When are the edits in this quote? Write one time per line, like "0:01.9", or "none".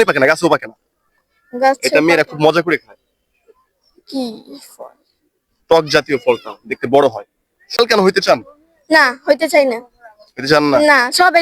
0:07.8